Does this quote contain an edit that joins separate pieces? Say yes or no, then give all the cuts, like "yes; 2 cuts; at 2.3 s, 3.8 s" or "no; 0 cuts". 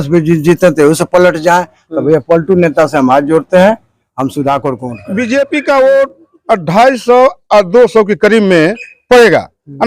yes; 1 cut; at 5.0 s